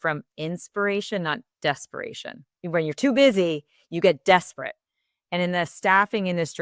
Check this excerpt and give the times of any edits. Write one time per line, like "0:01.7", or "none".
0:02.5